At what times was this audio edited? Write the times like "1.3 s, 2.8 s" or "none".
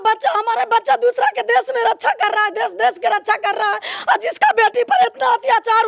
none